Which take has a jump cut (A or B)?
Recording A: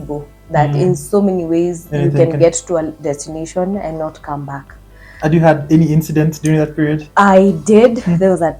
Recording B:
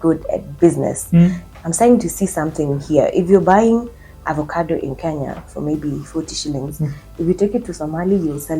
B